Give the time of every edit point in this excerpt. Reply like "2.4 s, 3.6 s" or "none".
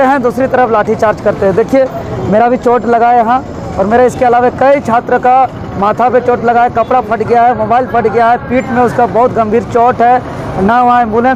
none